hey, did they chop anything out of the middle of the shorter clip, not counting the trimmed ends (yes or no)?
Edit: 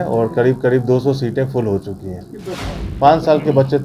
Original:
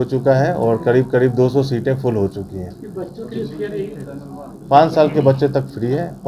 yes